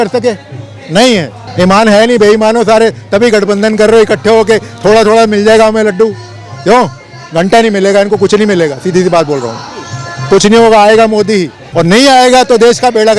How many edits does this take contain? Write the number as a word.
two